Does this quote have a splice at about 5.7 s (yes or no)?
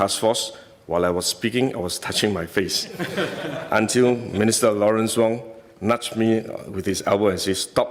no